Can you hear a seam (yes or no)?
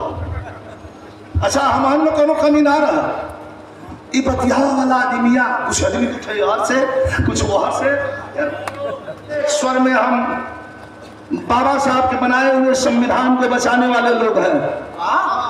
yes